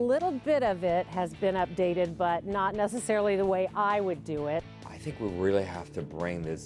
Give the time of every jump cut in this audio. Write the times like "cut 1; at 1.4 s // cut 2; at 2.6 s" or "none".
cut 1; at 4.6 s